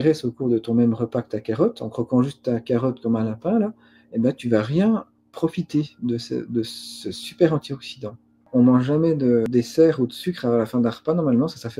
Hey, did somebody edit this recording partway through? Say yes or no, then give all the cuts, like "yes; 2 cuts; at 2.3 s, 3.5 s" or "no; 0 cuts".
yes; 2 cuts; at 8.4 s, 9.5 s